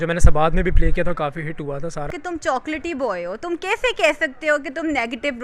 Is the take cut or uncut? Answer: cut